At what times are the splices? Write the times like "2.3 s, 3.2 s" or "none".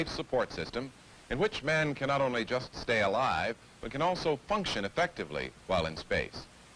4.5 s